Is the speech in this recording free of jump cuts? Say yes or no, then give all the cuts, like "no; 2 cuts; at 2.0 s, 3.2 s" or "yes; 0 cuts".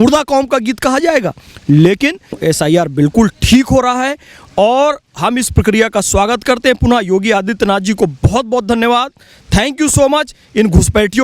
no; 1 cut; at 2.4 s